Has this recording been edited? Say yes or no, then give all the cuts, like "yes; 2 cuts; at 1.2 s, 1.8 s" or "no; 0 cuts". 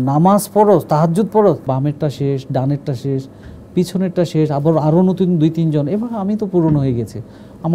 yes; 1 cut; at 1.6 s